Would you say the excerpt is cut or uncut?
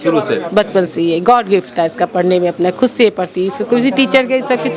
uncut